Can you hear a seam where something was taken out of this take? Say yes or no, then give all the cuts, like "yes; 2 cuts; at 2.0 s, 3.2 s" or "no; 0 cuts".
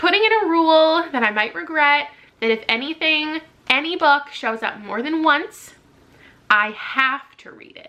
no; 0 cuts